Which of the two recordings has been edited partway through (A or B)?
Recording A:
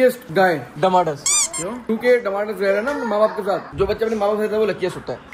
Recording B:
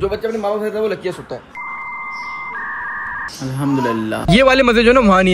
B